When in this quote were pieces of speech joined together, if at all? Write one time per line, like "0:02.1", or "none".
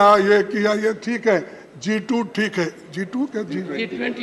none

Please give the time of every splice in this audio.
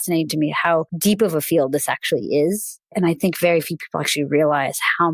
0:00.9
0:02.8

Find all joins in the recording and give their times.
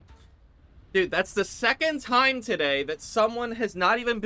none

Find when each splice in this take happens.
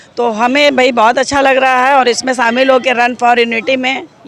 none

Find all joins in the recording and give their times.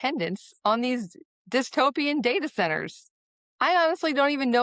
none

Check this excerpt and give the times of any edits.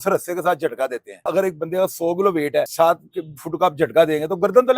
0:01.2
0:02.7

